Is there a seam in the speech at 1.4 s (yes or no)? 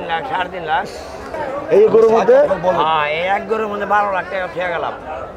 yes